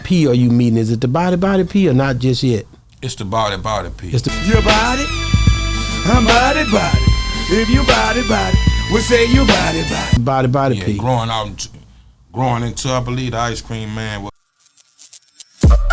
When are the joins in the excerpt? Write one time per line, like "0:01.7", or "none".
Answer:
0:14.3